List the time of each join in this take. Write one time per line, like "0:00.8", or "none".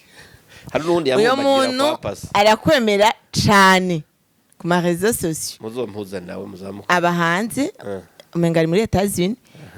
none

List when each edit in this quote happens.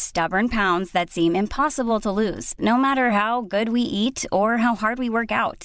none

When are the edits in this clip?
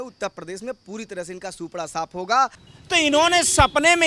0:02.7

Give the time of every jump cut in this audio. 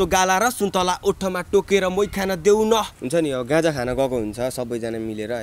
0:03.0

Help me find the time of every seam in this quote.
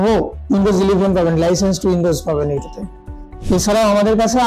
none

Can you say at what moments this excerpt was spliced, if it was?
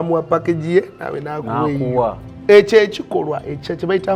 0:02.3

